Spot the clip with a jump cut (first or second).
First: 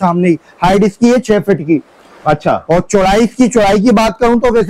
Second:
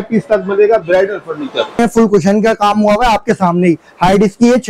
second